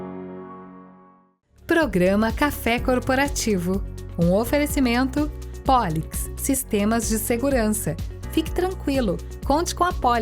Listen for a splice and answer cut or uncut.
cut